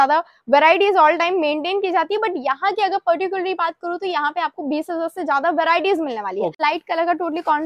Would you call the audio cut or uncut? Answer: cut